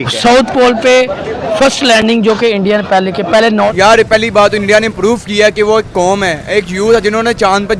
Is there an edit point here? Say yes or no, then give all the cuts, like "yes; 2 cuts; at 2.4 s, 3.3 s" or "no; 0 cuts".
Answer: yes; 1 cut; at 3.8 s